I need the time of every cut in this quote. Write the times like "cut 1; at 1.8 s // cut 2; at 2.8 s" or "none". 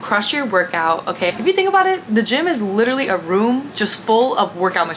none